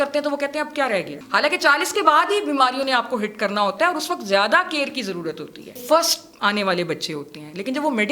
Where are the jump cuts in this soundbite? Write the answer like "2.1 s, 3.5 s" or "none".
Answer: 1.2 s, 5.8 s